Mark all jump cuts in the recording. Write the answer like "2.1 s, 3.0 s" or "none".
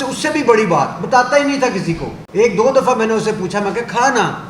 2.1 s